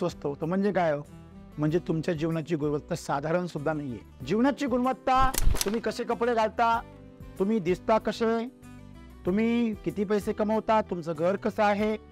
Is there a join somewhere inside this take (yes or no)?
no